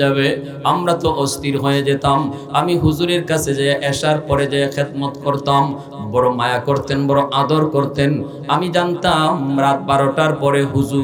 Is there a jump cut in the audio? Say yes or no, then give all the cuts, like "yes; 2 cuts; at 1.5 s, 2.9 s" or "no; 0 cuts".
no; 0 cuts